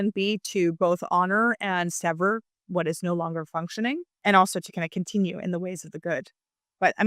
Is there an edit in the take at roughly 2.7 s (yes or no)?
yes